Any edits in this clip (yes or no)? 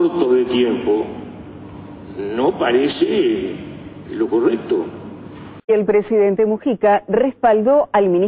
yes